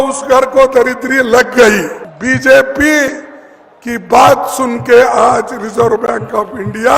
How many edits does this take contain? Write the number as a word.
one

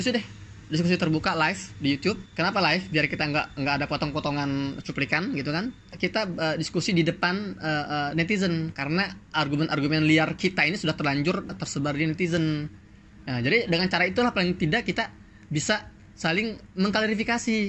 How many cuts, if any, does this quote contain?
three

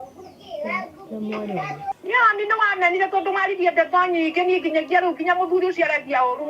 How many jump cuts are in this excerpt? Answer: one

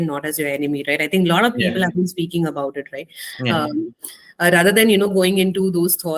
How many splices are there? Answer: zero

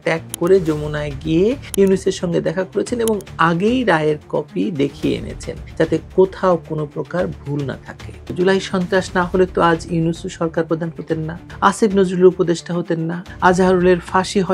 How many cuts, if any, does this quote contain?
one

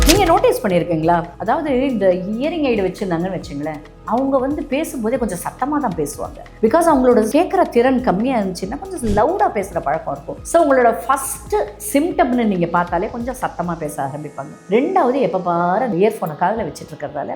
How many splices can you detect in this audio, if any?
one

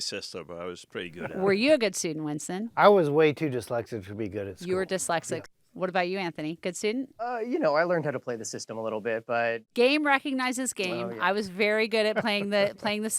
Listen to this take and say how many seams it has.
three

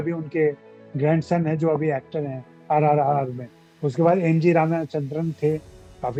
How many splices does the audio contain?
zero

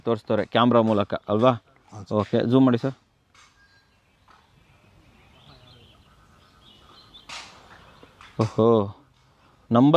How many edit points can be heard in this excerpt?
zero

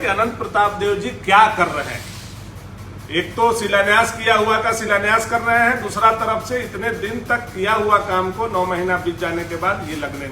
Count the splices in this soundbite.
zero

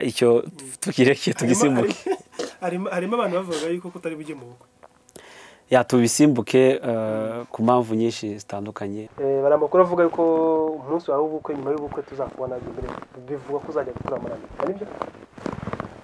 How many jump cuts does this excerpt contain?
one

